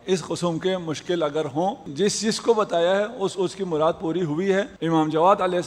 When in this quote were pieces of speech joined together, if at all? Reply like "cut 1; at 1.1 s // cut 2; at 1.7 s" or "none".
cut 1; at 1.9 s // cut 2; at 4.7 s

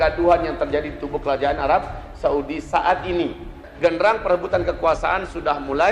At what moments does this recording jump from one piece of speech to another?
cut 1; at 3.6 s

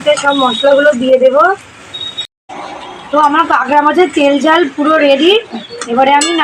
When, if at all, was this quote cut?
cut 1; at 2.4 s

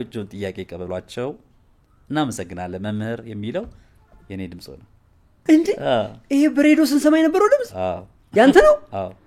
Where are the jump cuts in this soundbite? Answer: cut 1; at 5.3 s

